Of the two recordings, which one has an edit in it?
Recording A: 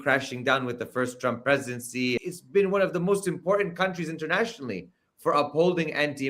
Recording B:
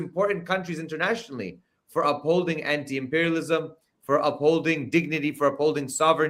A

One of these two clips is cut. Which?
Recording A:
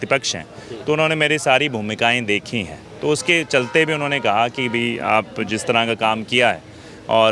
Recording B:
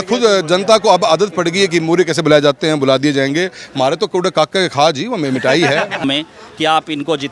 B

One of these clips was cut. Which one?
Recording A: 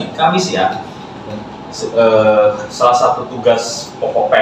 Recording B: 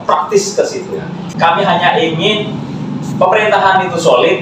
B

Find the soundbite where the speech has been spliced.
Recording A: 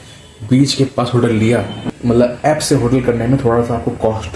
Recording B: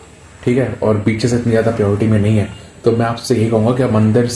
A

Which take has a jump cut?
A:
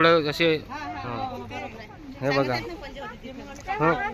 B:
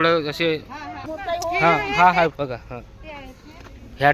B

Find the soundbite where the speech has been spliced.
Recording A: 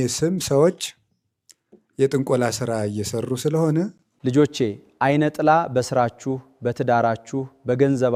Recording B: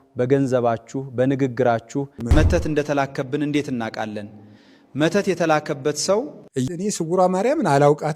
B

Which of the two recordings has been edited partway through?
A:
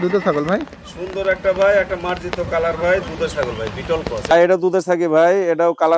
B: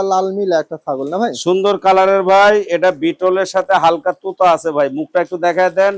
A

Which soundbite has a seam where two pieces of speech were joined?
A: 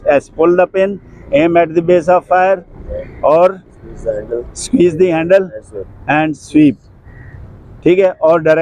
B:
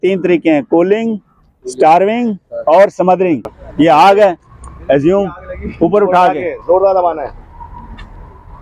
B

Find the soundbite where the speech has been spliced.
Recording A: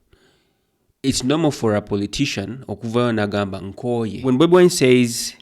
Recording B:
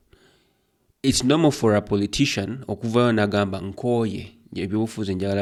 A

